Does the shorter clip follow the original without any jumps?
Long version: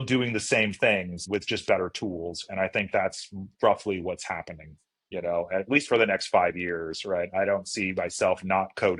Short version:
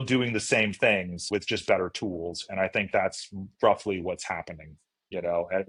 yes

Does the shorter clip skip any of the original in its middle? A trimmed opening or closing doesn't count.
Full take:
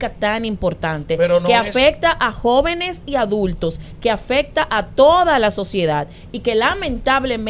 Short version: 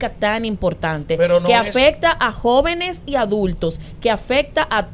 no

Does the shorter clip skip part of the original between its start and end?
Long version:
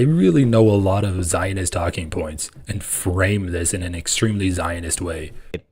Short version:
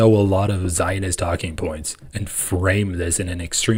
no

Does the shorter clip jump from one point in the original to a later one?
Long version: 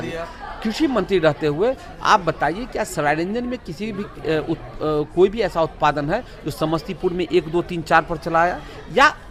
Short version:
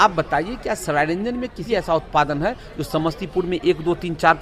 yes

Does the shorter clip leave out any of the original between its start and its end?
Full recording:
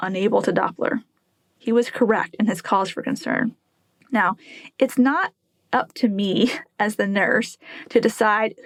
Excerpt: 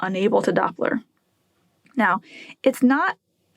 yes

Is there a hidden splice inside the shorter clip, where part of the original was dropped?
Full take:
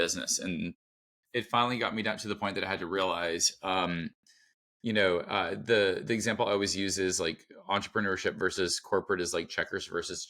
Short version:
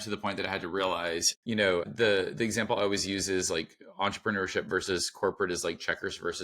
yes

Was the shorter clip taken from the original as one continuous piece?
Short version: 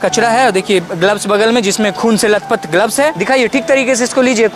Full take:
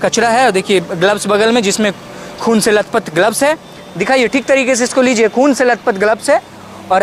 no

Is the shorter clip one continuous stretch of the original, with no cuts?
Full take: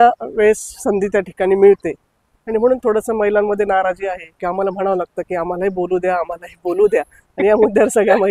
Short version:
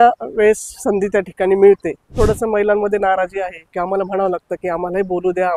no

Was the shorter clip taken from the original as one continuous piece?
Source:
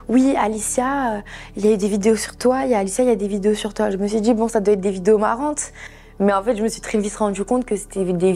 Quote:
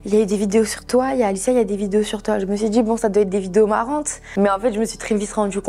no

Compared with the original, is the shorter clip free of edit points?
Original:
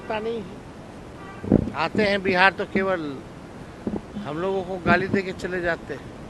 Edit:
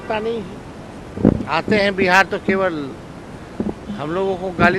no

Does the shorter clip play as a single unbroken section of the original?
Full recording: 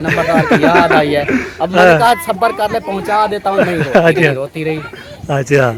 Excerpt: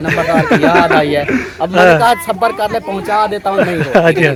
yes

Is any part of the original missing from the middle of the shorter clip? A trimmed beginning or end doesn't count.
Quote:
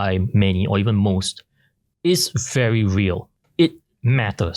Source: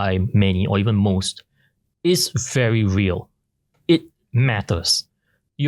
yes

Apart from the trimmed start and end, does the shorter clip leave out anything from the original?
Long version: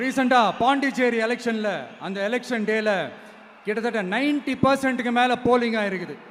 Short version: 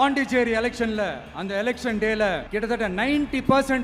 yes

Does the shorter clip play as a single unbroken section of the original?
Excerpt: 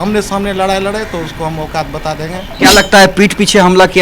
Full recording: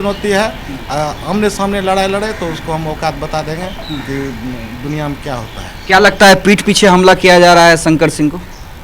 no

